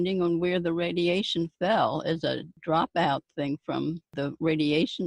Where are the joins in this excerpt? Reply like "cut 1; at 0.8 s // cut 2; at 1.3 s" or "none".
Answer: cut 1; at 2.5 s // cut 2; at 4.1 s